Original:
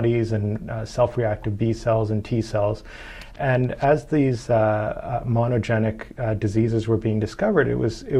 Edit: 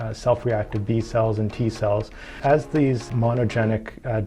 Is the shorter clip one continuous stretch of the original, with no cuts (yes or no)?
no